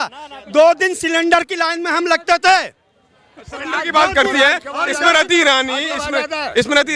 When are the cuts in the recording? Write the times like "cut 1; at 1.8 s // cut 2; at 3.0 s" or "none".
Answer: none